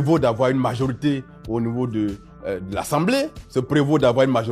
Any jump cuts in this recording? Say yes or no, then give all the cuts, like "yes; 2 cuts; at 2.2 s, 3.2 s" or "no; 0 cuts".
yes; 1 cut; at 3.4 s